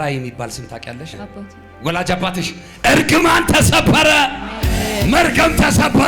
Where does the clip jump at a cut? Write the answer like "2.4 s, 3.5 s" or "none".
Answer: 1.2 s